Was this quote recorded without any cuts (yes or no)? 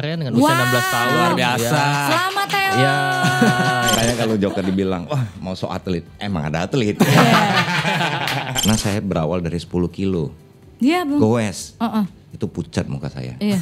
no